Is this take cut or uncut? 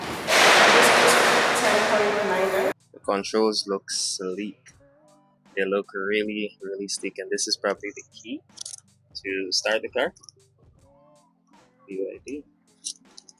cut